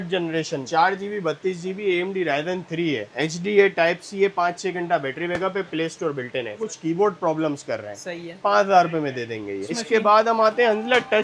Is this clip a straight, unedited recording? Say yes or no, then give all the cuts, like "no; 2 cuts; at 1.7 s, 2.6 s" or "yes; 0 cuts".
yes; 0 cuts